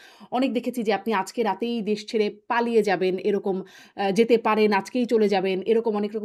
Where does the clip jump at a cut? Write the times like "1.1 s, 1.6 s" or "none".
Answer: none